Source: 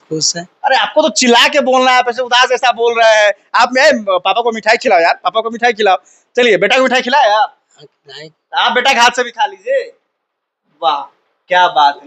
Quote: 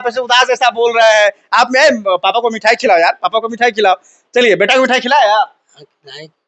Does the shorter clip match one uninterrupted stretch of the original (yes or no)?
yes